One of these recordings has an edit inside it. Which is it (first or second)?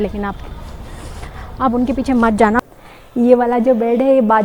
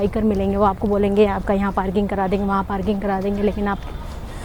first